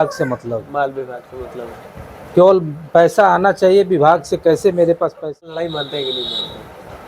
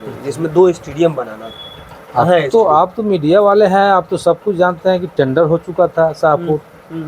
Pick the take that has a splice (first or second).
first